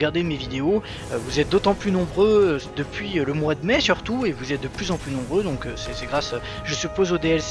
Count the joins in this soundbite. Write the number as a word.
one